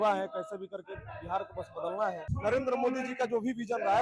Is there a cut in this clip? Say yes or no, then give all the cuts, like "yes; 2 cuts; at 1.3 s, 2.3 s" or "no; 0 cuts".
yes; 1 cut; at 2.3 s